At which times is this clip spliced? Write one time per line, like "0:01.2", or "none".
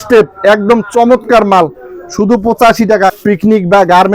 0:03.2